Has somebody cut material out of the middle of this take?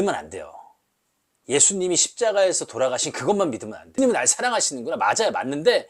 yes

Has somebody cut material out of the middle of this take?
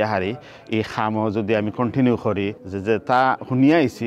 yes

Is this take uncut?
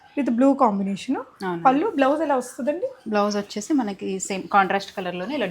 yes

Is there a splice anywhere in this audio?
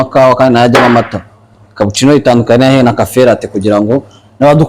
no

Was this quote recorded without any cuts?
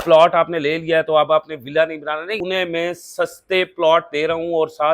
no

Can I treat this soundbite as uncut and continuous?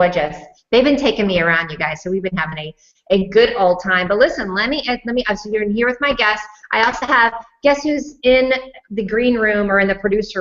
yes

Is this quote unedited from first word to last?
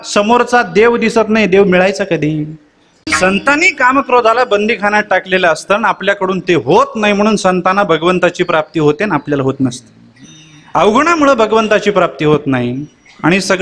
no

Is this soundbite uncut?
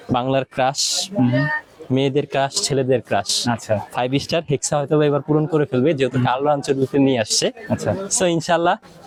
yes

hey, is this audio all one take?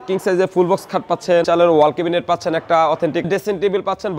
no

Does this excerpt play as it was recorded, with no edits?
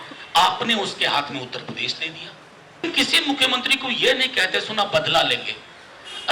no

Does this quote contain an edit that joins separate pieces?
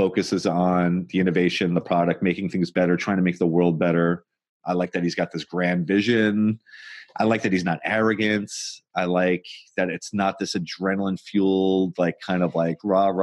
yes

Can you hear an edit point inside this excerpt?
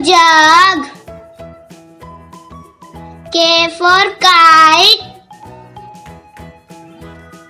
no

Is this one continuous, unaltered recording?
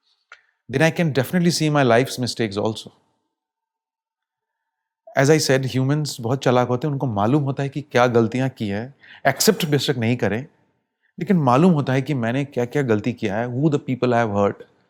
yes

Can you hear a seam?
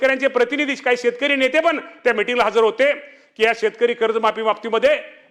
no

